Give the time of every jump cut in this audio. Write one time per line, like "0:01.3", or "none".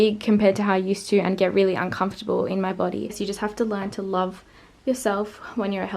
0:03.2